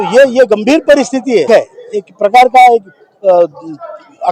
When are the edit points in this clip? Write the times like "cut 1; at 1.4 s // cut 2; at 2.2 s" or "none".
cut 1; at 1.5 s